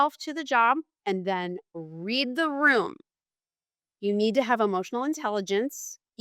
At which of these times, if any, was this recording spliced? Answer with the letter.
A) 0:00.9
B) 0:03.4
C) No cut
A